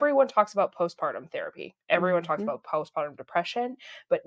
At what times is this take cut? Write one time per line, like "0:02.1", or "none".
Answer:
none